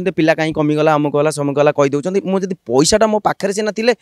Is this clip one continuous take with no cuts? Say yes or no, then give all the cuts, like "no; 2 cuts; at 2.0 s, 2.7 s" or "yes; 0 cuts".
yes; 0 cuts